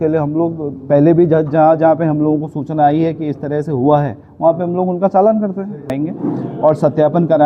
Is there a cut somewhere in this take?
yes; 1 cut; at 5.9 s

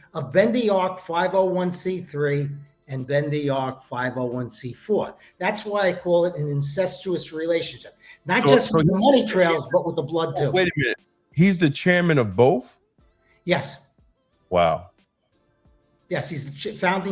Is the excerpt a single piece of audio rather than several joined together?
yes; 0 cuts

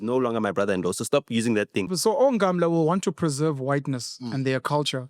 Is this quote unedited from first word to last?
no; 1 cut; at 1.9 s

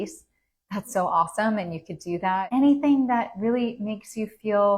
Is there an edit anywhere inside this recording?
yes; 1 cut; at 2.4 s

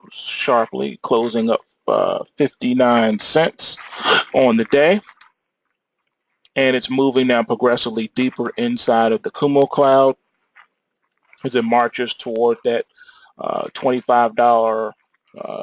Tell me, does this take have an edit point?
yes; 1 cut; at 13.0 s

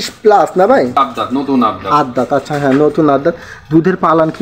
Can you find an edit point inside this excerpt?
yes; 1 cut; at 1.0 s

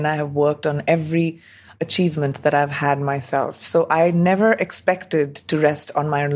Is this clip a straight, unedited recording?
no; 1 cut; at 1.7 s

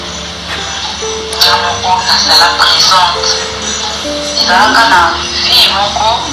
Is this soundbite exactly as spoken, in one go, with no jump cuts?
yes; 0 cuts

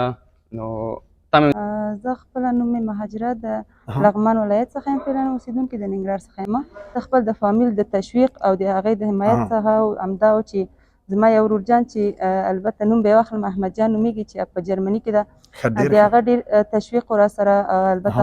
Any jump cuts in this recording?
yes; 2 cuts; at 1.5 s, 7.0 s

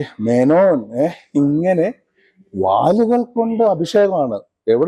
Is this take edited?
no; 0 cuts

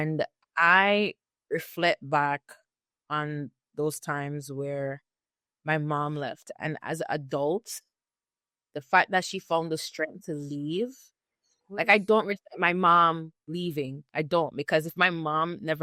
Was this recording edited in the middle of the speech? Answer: no; 0 cuts

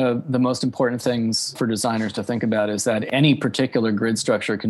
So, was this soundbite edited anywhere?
yes; 2 cuts; at 1.5 s, 3.1 s

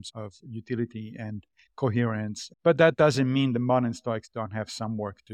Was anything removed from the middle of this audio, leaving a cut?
yes; 1 cut; at 2.4 s

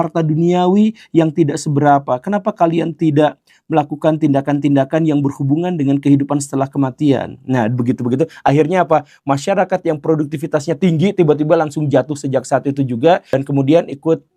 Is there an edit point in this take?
yes; 1 cut; at 13.3 s

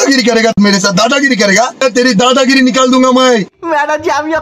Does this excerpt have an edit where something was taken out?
yes; 2 cuts; at 1.8 s, 3.5 s

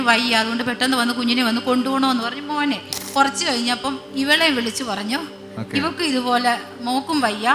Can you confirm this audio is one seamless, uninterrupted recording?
no; 1 cut; at 3.0 s

